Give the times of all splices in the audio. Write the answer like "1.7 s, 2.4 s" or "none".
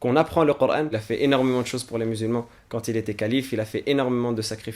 1.0 s